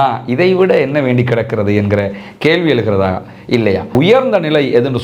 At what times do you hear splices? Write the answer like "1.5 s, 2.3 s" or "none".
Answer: 3.9 s